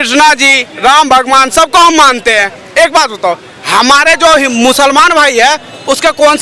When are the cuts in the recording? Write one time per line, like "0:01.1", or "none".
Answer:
none

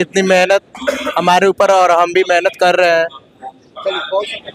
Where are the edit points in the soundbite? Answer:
none

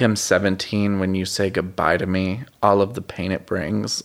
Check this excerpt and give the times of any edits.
none

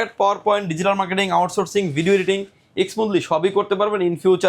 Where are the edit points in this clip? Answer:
none

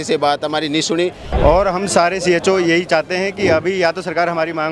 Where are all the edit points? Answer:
0:01.3

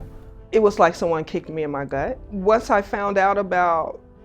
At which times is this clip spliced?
0:02.3

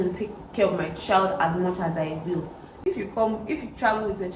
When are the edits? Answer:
0:02.7

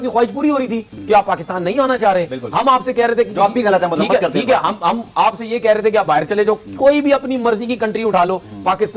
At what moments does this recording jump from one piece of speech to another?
none

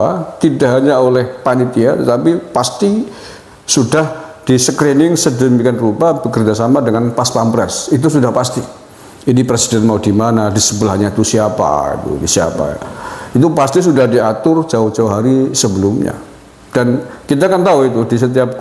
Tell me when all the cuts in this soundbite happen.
none

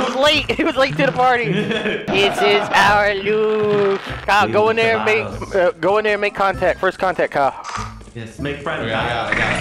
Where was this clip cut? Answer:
0:02.0
0:04.1

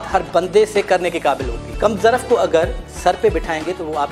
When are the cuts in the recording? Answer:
0:01.7

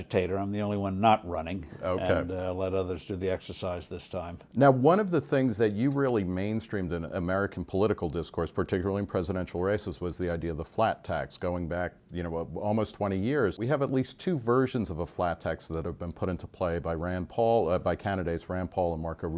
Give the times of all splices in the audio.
0:02.3

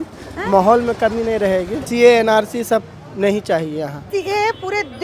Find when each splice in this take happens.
0:01.8
0:04.1

